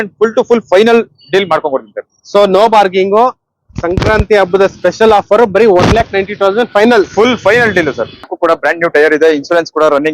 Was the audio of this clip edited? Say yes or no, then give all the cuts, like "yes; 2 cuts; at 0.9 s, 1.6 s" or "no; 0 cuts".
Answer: yes; 1 cut; at 8.3 s